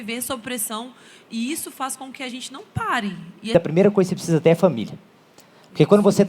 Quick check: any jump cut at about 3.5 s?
yes; 1 cut; at 3.5 s

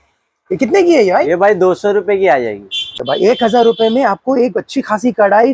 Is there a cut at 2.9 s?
yes; 1 cut; at 2.9 s

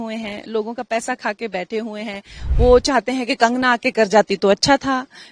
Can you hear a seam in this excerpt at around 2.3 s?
yes; 1 cut; at 2.3 s

